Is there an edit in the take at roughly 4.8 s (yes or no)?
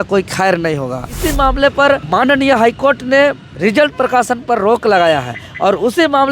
no